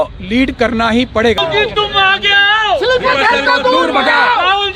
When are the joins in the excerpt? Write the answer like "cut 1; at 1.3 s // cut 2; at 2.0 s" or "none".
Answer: cut 1; at 1.4 s